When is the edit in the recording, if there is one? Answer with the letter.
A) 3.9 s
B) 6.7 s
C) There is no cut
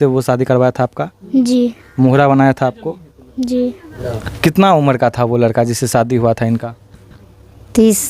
A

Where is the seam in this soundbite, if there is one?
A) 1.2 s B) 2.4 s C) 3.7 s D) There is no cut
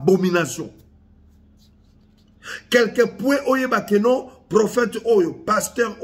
D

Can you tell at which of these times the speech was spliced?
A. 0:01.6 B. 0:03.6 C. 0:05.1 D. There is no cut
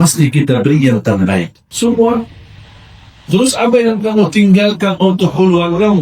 A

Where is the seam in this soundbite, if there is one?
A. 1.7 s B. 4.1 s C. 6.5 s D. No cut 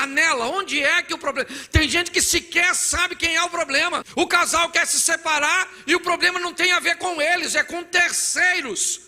B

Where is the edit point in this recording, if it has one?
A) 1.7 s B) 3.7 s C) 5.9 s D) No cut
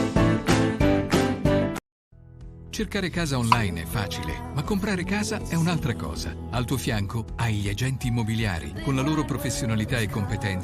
A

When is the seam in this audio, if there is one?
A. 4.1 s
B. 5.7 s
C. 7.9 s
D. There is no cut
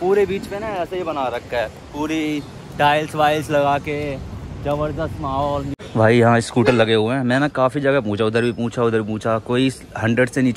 B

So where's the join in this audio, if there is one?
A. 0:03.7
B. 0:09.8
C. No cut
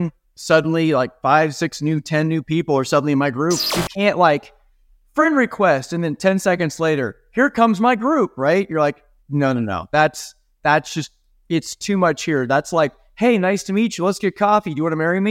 A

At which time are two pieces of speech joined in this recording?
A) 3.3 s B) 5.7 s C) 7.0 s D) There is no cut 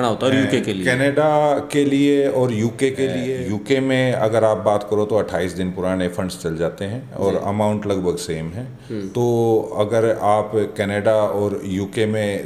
A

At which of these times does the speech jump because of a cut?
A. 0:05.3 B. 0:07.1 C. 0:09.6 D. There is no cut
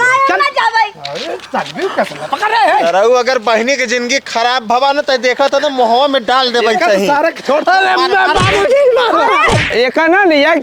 C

